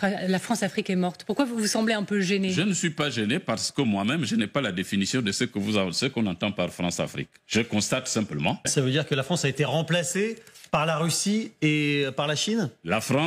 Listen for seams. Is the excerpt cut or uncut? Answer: cut